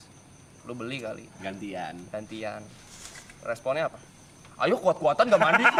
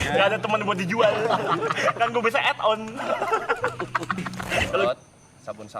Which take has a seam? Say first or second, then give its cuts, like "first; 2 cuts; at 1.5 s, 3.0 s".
second; 1 cut; at 4.8 s